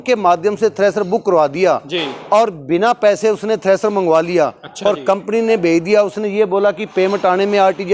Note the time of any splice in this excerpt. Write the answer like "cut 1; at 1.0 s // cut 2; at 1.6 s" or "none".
none